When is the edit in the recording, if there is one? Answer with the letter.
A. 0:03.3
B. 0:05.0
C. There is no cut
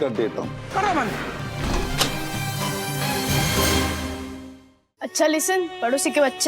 B